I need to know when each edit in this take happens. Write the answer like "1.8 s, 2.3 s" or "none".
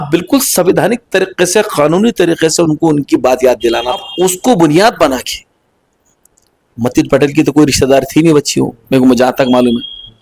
4.1 s